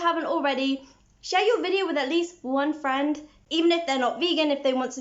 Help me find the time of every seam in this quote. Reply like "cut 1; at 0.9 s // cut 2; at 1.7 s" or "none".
cut 1; at 3.3 s